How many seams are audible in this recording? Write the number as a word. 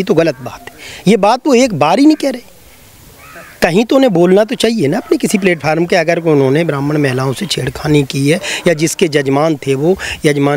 zero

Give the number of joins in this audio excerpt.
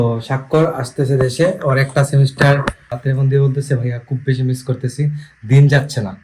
one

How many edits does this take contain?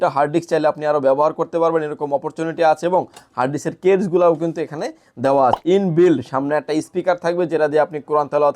one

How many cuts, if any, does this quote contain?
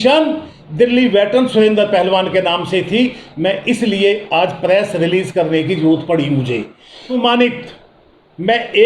one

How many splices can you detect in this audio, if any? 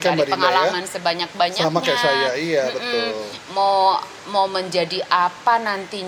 zero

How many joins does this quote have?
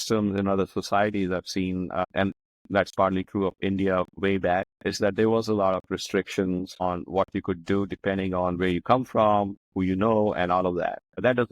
one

